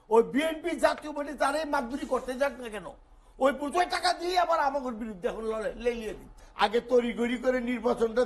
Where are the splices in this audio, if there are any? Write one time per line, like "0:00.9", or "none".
0:06.4